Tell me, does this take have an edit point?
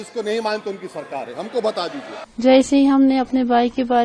yes; 1 cut; at 2.2 s

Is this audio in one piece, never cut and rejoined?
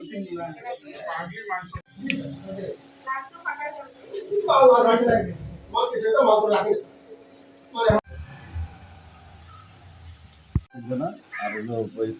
no; 3 cuts; at 1.9 s, 8.1 s, 10.6 s

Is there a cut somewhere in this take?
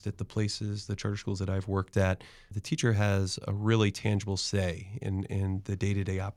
no; 0 cuts

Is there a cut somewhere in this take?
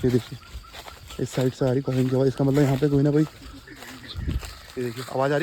no; 0 cuts

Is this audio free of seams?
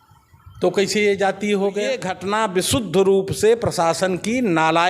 no; 1 cut; at 2.1 s

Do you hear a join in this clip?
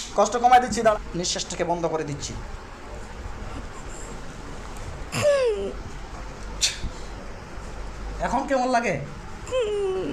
yes; 1 cut; at 0.9 s

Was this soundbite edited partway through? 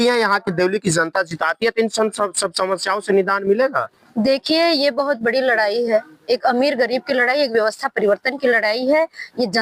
no; 0 cuts

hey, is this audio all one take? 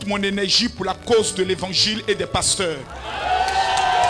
yes; 0 cuts

